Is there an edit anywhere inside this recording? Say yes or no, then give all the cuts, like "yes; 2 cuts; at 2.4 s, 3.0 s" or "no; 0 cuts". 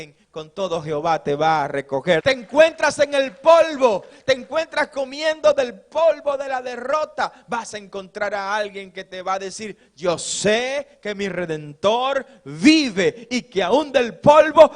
yes; 1 cut; at 2.2 s